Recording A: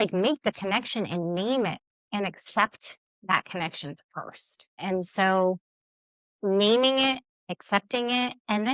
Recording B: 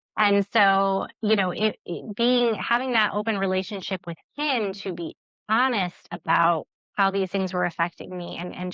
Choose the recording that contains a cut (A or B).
B